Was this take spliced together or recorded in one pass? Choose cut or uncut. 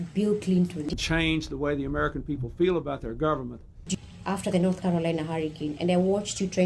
cut